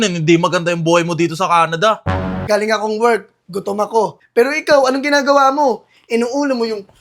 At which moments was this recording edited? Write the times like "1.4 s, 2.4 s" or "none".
2.4 s, 4.2 s